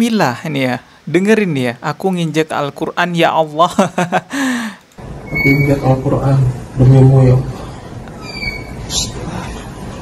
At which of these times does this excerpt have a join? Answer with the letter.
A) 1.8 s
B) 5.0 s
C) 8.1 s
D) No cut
D